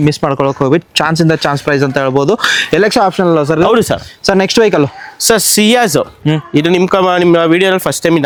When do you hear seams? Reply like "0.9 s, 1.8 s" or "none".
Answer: none